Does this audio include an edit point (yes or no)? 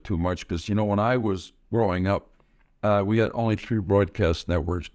no